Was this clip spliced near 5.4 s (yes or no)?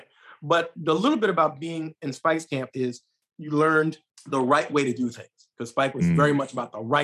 no